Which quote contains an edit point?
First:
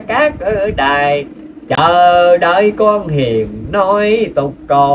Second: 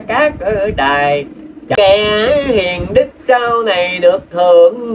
second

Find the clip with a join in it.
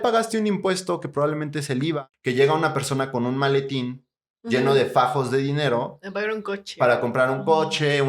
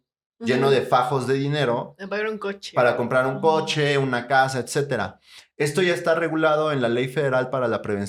first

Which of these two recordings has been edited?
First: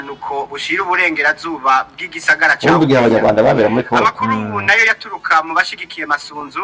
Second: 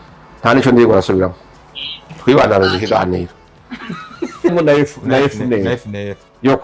second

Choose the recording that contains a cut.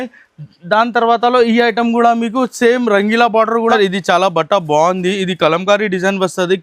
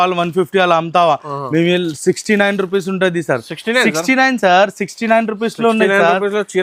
first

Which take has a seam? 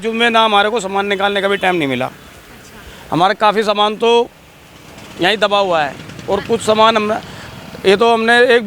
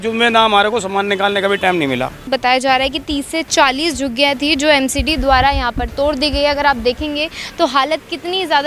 second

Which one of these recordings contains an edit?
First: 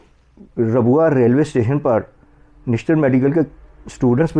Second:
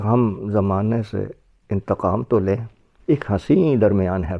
second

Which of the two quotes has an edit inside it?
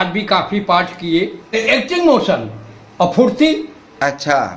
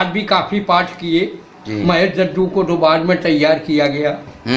first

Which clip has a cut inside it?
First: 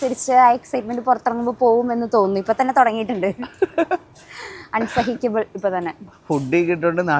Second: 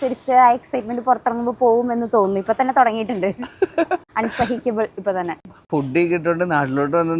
second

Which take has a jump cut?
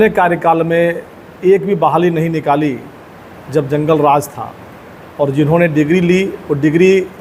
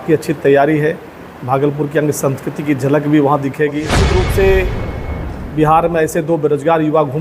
second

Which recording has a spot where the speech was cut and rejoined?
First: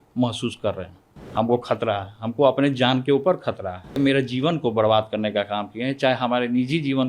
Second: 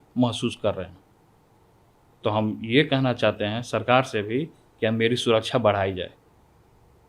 first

